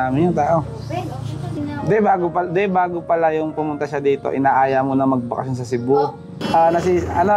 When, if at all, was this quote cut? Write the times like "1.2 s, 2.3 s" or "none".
1.5 s, 6.3 s